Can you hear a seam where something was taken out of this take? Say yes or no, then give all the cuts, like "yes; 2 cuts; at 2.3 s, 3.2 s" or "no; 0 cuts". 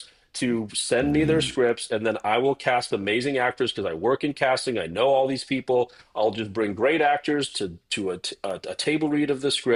no; 0 cuts